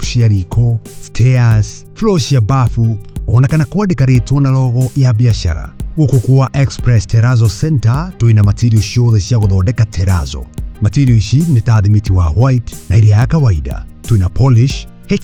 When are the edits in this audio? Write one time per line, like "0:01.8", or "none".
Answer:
none